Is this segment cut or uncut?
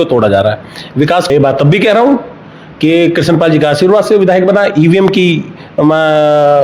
cut